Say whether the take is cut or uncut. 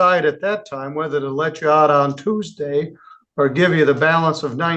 uncut